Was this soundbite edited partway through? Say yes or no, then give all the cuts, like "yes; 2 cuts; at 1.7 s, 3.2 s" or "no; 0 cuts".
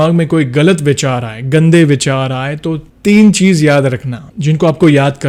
no; 0 cuts